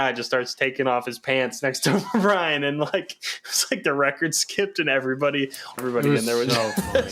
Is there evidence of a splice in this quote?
yes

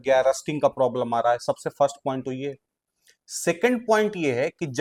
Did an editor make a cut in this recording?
no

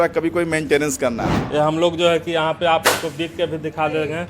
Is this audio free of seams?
no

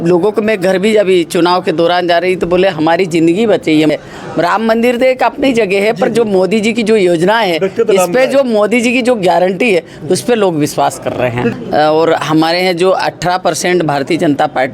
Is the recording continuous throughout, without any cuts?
no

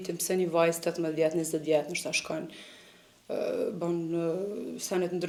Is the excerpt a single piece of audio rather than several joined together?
yes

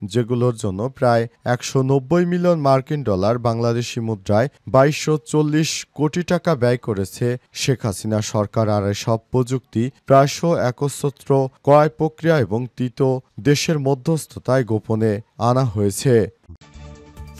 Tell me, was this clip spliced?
yes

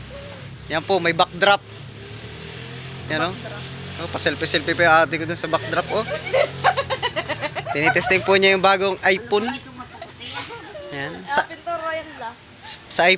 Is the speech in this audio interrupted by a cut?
no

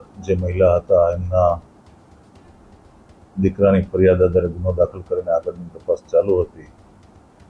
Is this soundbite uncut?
yes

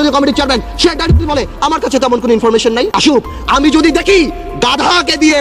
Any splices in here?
yes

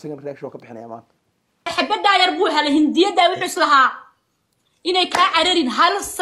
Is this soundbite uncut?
no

